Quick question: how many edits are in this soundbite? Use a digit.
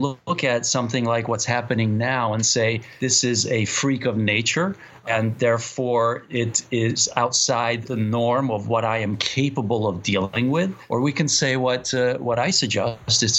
3